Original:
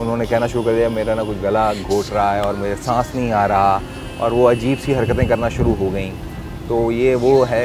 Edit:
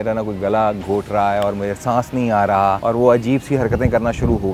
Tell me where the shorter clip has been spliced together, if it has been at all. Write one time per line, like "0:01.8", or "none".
0:02.8

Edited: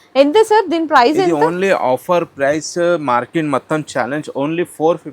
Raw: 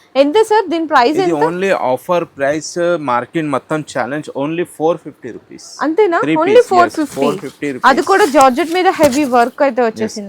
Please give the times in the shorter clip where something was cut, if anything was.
none

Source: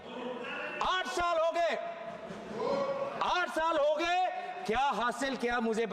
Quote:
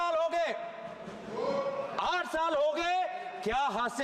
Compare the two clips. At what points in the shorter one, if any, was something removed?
none

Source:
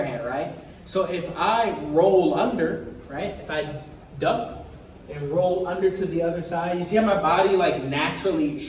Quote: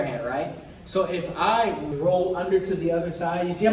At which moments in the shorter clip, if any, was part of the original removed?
0:01.8

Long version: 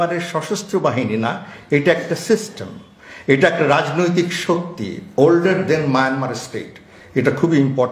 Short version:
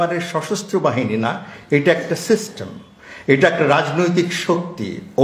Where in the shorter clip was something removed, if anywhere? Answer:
none

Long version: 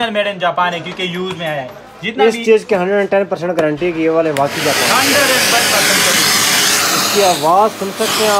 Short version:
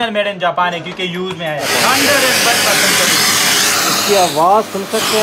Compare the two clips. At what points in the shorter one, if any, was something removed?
0:01.7

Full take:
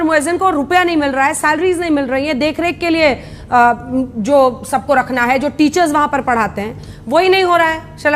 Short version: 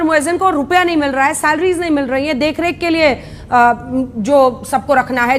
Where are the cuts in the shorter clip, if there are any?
none

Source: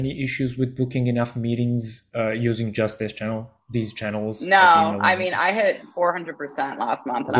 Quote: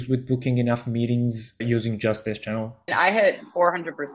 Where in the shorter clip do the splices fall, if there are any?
0:01.6
0:02.9

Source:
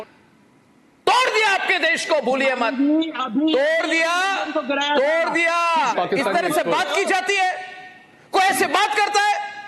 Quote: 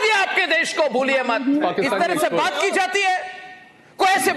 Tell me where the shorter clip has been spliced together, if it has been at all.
0:01.6

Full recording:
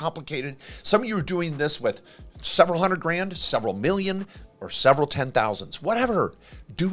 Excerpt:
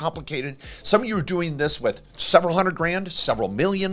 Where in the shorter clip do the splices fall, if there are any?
0:02.1

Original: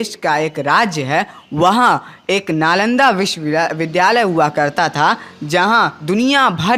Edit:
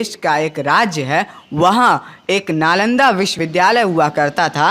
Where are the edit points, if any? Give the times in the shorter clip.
0:03.4

